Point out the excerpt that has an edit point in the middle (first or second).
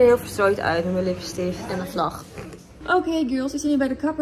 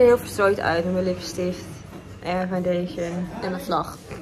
first